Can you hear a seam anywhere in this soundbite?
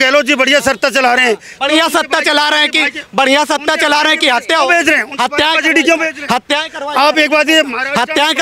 no; 0 cuts

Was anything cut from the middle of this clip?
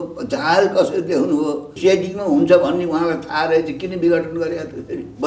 yes; 1 cut; at 1.7 s

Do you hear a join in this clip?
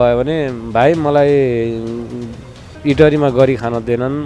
no; 0 cuts

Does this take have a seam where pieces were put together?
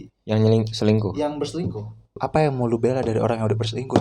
yes; 1 cut; at 2.1 s

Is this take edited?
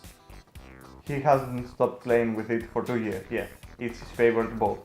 yes; 1 cut; at 1.0 s

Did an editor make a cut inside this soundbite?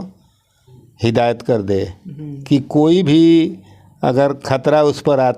no; 0 cuts

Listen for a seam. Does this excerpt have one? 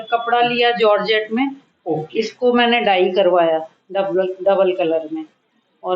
no; 0 cuts

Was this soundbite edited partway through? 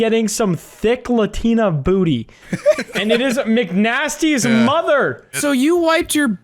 yes; 1 cut; at 5.3 s

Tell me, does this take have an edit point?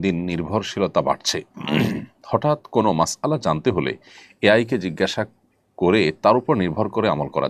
no; 0 cuts

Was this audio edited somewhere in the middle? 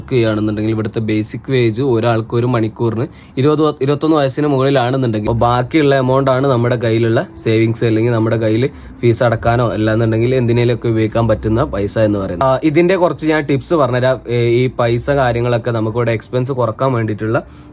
yes; 2 cuts; at 5.2 s, 12.4 s

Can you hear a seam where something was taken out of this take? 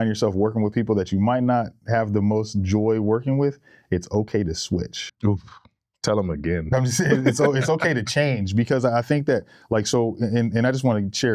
no; 0 cuts

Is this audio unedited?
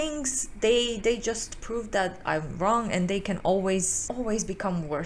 yes; 0 cuts

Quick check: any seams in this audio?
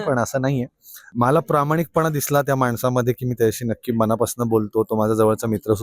yes; 1 cut; at 1.1 s

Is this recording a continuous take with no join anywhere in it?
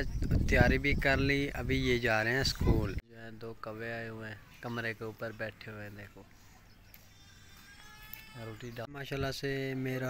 no; 2 cuts; at 3.0 s, 8.8 s

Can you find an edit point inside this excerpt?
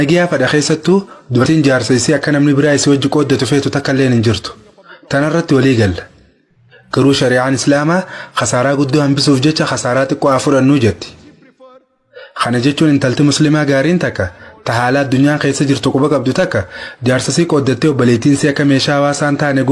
yes; 1 cut; at 1.4 s

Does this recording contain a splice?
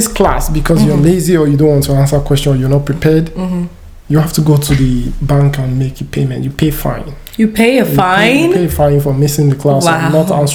no; 0 cuts

